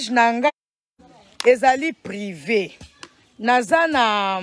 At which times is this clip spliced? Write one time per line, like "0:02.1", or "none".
0:01.0